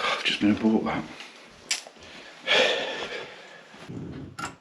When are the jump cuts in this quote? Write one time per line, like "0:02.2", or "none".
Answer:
0:02.2
0:03.8

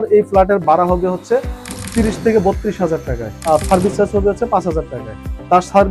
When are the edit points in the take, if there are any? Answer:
none

